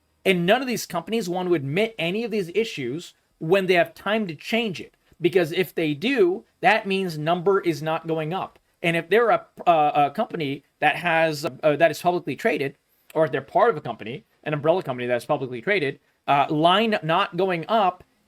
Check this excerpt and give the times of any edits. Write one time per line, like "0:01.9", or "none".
0:11.5